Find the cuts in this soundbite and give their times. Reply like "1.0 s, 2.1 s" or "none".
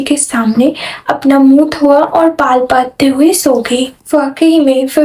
3.9 s